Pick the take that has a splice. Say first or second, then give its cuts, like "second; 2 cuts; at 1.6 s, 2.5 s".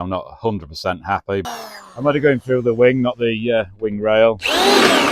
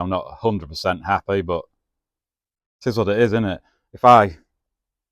first; 1 cut; at 1.5 s